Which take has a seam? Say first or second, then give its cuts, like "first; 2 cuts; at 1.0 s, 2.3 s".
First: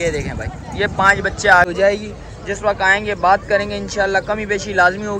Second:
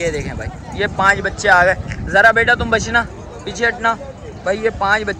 first; 1 cut; at 1.6 s